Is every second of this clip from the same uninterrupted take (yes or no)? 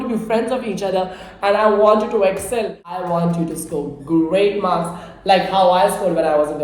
no